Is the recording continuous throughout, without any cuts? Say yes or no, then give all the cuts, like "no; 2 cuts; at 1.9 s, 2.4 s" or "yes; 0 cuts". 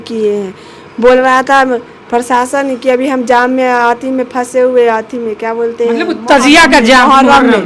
yes; 0 cuts